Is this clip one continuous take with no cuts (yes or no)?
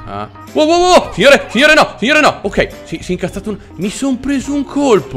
yes